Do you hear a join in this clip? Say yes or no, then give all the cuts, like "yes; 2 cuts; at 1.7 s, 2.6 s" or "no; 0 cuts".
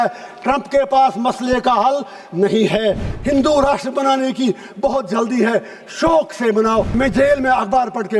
yes; 2 cuts; at 3.1 s, 6.9 s